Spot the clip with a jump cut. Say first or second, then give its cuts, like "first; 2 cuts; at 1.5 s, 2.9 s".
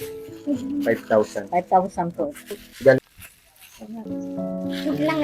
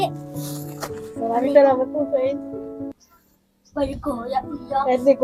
first; 1 cut; at 3.0 s